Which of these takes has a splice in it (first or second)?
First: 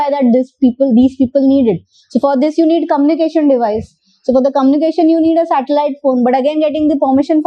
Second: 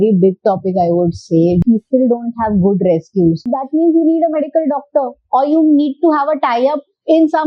second